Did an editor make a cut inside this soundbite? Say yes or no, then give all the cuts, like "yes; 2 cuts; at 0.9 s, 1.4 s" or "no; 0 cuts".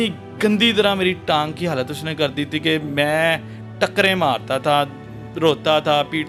no; 0 cuts